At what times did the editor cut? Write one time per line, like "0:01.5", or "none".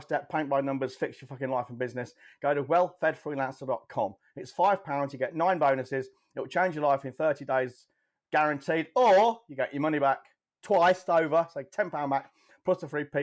none